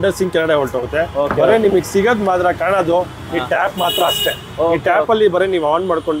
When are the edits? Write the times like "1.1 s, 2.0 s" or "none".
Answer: none